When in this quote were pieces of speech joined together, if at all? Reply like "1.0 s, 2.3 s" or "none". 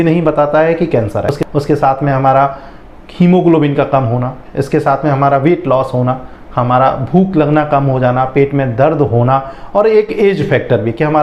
none